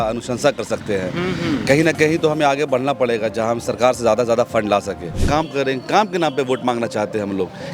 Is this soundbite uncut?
no; 1 cut; at 5.3 s

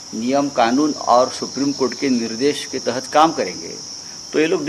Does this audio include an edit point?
no; 0 cuts

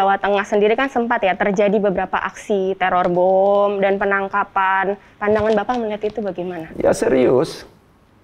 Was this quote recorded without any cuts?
no; 1 cut; at 5.1 s

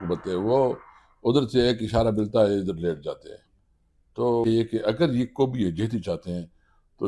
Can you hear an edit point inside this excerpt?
yes; 1 cut; at 4.4 s

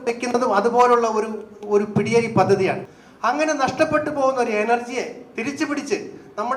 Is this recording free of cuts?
no; 1 cut; at 2.9 s

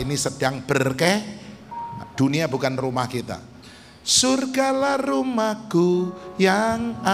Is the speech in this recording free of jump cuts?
yes; 0 cuts

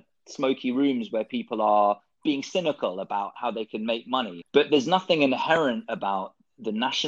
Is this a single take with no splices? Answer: no; 1 cut; at 4.4 s

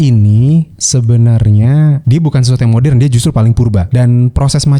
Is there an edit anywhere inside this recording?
yes; 2 cuts; at 2.0 s, 3.9 s

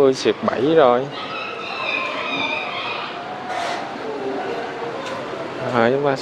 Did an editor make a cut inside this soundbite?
no; 0 cuts

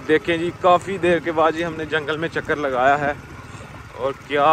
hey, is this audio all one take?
yes; 0 cuts

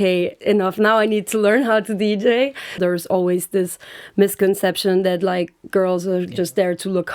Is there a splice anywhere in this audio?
yes; 1 cut; at 2.8 s

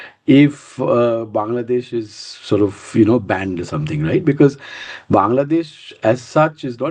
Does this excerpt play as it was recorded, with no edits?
yes; 0 cuts

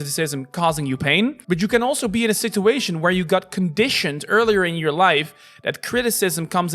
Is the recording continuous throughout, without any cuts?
no; 1 cut; at 1.4 s

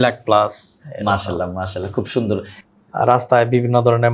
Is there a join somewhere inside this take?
yes; 1 cut; at 2.5 s

